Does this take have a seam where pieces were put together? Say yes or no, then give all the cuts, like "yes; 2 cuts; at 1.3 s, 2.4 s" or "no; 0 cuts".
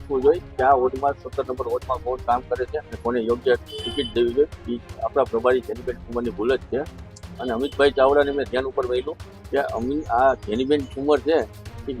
no; 0 cuts